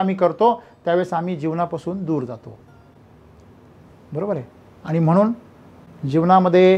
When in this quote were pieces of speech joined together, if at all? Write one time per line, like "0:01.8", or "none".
none